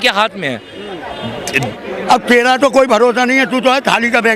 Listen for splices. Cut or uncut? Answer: cut